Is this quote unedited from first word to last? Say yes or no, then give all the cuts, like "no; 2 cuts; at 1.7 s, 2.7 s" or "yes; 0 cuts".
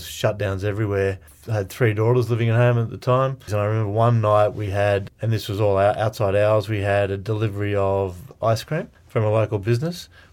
no; 4 cuts; at 1.4 s, 3.4 s, 5.1 s, 9.0 s